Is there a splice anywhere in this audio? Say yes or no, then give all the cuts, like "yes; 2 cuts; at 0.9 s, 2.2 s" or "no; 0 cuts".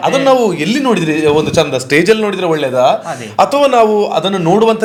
no; 0 cuts